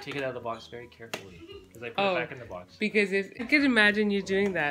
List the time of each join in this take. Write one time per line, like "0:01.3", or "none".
0:03.4